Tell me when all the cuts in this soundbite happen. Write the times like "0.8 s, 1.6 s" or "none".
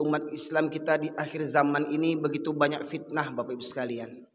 none